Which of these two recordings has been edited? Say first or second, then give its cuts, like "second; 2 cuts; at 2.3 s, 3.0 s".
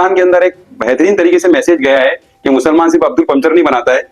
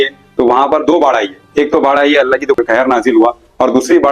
second; 1 cut; at 2.6 s